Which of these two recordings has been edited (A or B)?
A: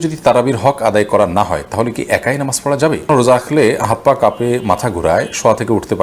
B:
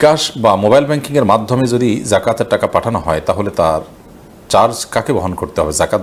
A